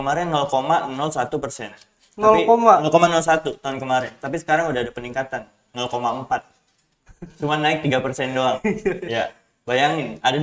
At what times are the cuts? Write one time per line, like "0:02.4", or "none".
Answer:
none